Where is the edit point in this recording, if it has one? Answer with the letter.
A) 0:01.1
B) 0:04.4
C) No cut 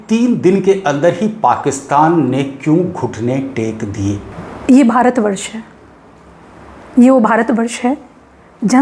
B